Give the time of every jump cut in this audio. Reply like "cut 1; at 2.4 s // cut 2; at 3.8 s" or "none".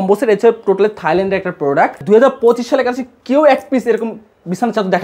cut 1; at 2.0 s